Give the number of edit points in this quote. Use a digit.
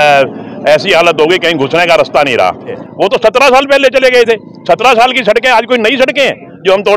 1